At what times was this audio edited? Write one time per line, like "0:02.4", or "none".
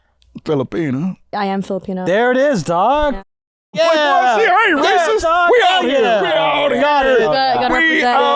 0:01.3

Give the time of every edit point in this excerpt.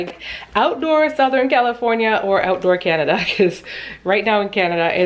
none

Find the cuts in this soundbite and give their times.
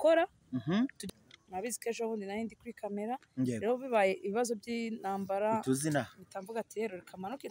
0:01.0

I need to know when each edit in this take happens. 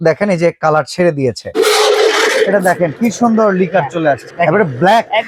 0:01.5
0:04.3

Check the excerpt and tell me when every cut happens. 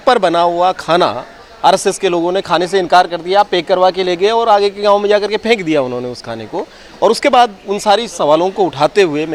none

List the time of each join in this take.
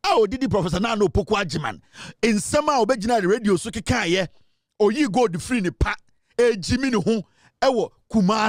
none

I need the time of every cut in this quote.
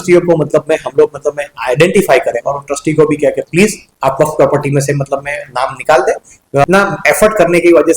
0:06.6

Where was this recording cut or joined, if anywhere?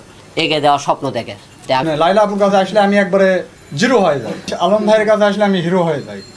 0:01.8
0:04.5

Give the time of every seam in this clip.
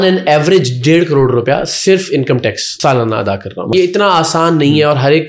0:02.7
0:03.7

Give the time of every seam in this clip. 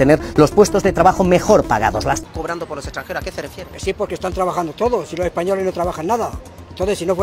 0:02.2

